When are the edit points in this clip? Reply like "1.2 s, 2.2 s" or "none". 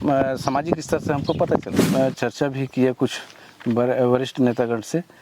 1.9 s